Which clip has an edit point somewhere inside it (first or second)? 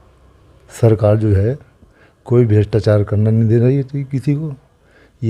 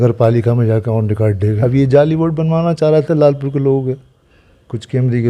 second